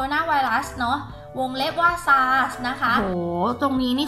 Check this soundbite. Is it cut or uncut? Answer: cut